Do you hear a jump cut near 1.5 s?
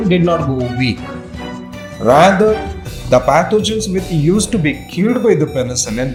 no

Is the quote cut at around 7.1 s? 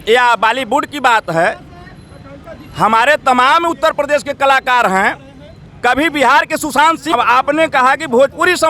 yes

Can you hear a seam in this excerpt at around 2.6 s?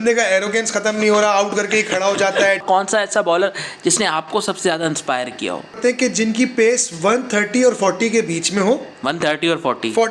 yes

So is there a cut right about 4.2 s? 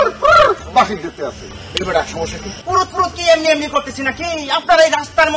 no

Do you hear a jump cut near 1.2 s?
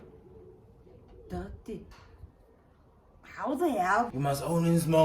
no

